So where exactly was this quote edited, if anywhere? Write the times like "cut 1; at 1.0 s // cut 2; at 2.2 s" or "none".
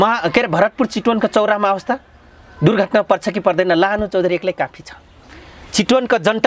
none